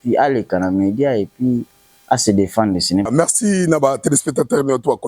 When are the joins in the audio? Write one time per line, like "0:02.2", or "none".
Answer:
0:03.1